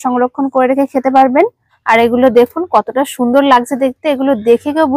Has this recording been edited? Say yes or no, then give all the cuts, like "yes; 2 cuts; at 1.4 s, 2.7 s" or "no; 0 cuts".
yes; 1 cut; at 1.7 s